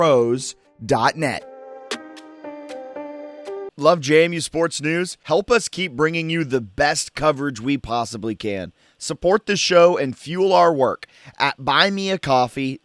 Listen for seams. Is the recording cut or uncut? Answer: cut